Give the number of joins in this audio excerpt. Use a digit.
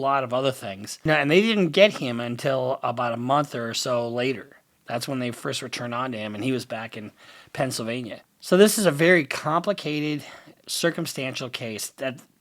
2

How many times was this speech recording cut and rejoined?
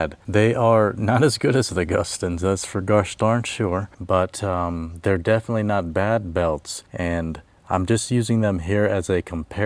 0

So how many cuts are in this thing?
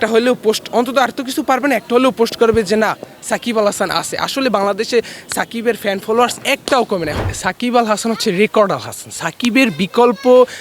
1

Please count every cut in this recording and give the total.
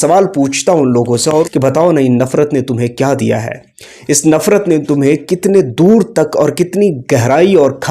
1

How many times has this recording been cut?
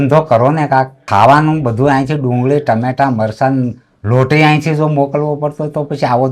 0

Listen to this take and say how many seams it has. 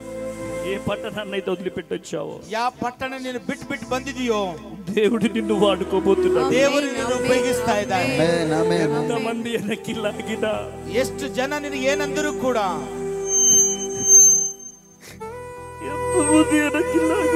0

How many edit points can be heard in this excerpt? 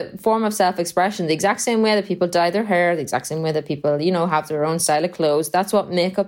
0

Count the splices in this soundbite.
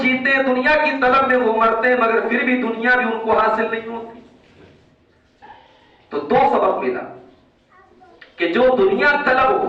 0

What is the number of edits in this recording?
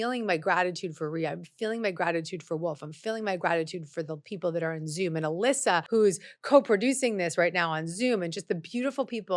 1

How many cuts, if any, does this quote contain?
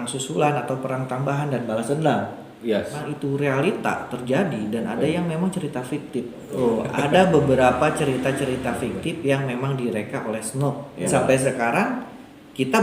3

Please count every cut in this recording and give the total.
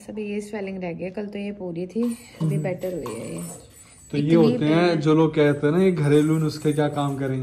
0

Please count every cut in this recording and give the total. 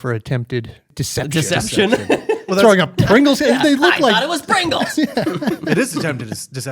1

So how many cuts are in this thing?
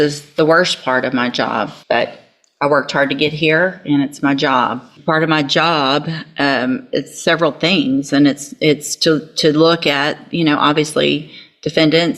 2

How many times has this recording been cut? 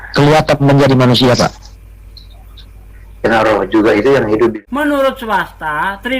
1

